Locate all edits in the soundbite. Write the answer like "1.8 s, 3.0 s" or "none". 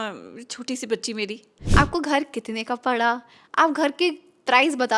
1.6 s